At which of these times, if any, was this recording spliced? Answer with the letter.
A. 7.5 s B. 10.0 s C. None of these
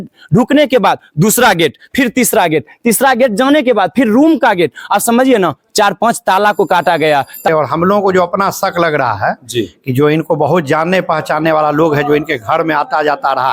A